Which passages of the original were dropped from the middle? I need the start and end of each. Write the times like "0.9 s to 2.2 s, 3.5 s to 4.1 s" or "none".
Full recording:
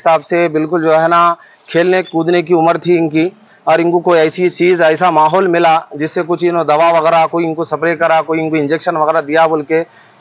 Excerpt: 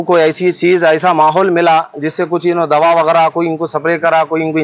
none